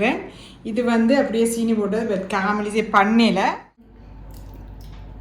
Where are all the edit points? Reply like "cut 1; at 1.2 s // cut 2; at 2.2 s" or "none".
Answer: cut 1; at 3.9 s